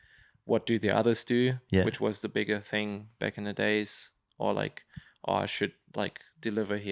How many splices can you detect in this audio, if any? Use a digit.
0